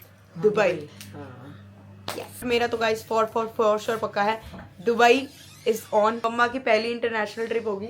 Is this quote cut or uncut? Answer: cut